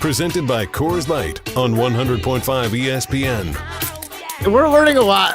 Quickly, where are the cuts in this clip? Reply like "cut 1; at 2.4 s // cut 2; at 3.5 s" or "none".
cut 1; at 4.3 s